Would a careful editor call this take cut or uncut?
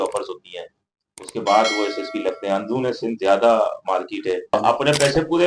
cut